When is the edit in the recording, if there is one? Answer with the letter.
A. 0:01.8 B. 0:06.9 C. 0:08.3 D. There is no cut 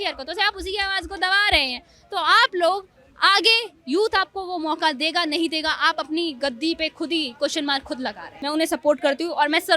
C